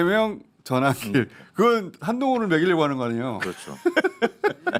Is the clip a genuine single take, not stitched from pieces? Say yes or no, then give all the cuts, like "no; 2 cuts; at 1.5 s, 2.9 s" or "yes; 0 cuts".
yes; 0 cuts